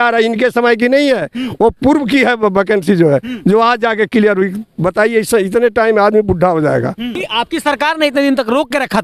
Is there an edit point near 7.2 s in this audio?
yes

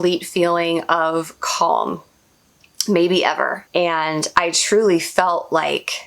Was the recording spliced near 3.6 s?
yes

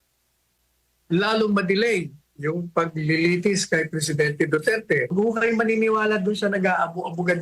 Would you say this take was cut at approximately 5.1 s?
yes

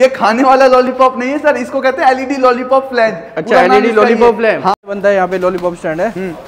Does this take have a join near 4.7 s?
yes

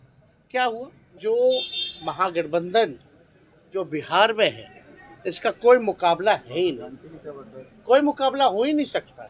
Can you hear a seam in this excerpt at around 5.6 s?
no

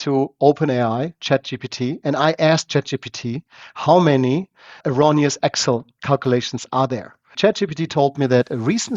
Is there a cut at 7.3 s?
yes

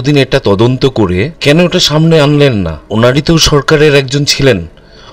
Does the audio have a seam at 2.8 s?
yes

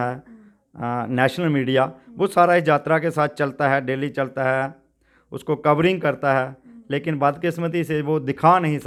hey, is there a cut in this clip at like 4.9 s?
no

